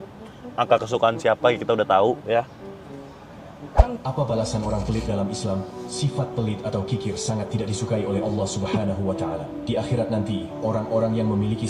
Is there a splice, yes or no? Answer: yes